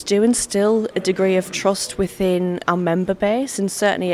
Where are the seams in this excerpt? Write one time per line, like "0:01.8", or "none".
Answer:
0:02.6